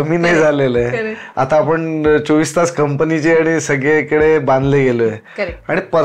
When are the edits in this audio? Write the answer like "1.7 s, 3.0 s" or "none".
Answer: none